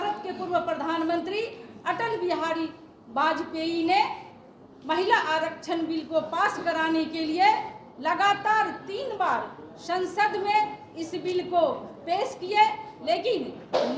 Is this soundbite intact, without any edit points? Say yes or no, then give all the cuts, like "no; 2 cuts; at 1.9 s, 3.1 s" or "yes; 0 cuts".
yes; 0 cuts